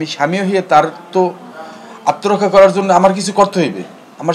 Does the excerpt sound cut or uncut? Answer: uncut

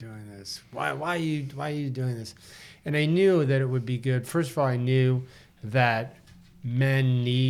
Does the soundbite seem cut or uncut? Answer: uncut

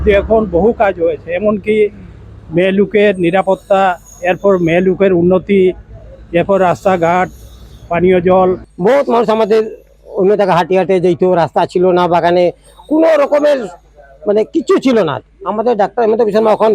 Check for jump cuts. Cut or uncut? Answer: cut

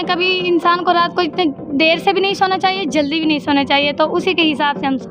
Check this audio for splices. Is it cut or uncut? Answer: uncut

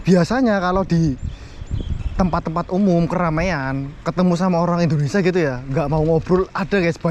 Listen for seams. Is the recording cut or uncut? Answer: uncut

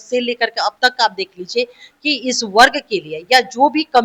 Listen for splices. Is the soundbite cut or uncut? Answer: uncut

